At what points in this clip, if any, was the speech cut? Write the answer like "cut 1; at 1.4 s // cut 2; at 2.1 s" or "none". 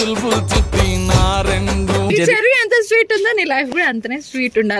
cut 1; at 2.1 s